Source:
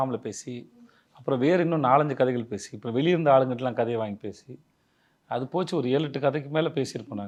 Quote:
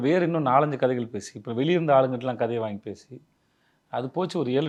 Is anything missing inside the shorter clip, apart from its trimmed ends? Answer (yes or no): no